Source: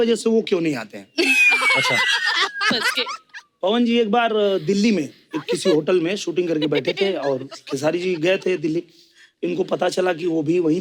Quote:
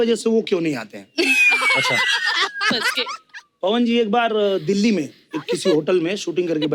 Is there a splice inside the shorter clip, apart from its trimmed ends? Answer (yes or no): no